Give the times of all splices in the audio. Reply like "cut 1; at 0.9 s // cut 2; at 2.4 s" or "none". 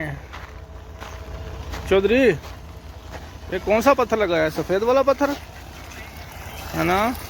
none